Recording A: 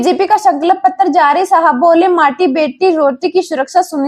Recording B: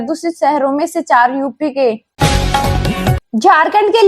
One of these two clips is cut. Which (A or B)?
B